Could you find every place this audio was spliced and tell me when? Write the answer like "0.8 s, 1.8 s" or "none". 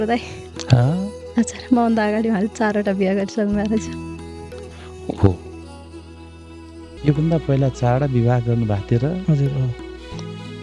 7.0 s